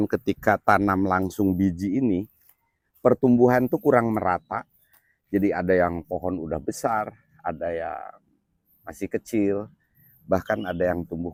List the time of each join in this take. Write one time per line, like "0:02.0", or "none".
none